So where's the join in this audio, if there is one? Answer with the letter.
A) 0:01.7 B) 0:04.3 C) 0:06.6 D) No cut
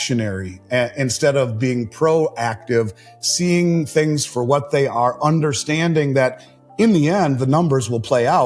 D